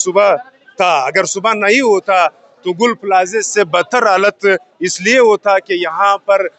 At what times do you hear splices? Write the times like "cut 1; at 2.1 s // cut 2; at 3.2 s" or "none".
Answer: none